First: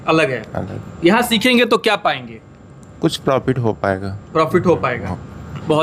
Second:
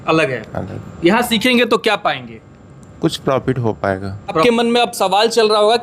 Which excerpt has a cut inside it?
second; 1 cut; at 4.4 s

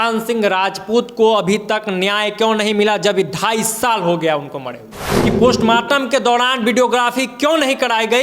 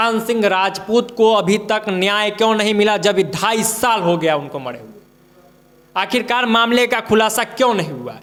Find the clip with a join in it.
first; 1 cut; at 5.1 s

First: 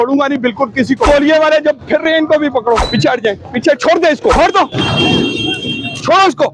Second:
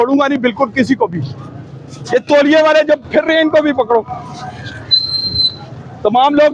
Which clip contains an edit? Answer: first; 3 cuts; at 1.1 s, 2.8 s, 4.4 s

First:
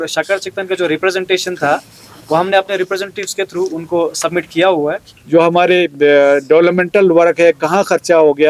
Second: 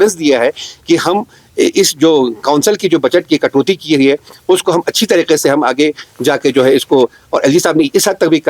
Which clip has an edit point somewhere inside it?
first; 1 cut; at 5.1 s

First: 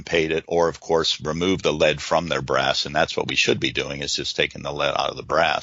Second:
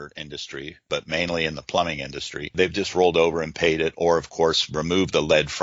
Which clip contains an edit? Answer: second; 2 cuts; at 0.8 s, 2.5 s

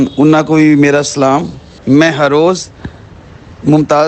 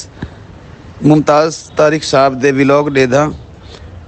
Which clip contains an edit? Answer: first; 1 cut; at 1.7 s

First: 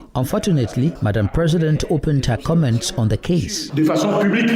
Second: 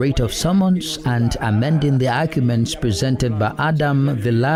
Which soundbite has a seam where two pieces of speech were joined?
first; 2 cuts; at 1.0 s, 3.6 s

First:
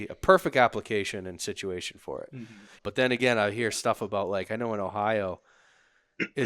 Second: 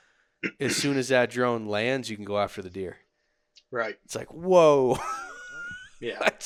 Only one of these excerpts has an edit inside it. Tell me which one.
first; 1 cut; at 2.8 s

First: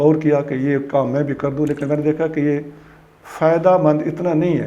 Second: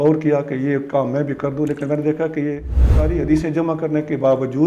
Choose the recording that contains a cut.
second; 1 cut; at 3.1 s

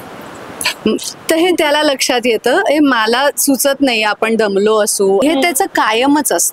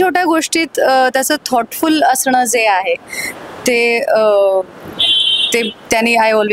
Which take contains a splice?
first; 1 cut; at 5.2 s

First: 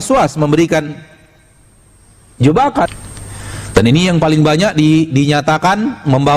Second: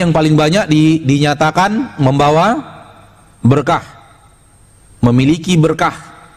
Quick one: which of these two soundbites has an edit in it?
first; 1 cut; at 2.9 s

